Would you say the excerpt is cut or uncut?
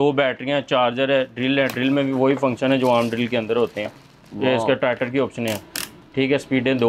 uncut